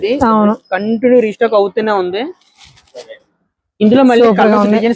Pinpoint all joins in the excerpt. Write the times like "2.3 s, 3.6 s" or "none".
none